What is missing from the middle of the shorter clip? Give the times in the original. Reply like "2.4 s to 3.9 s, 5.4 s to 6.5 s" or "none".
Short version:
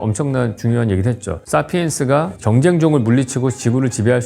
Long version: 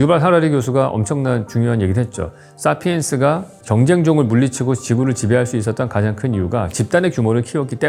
2.2 s to 2.4 s, 3.5 s to 3.6 s